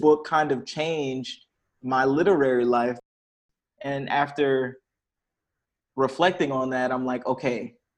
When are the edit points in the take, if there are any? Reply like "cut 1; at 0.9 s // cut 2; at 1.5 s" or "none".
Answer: cut 1; at 3.2 s